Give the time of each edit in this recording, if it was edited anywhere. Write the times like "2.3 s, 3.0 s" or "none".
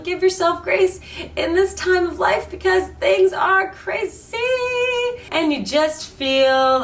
none